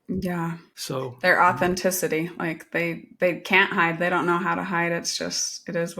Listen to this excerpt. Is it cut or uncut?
cut